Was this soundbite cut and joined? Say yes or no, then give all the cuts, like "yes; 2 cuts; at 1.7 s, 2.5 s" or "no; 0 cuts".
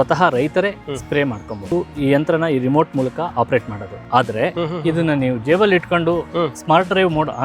yes; 2 cuts; at 1.6 s, 4.6 s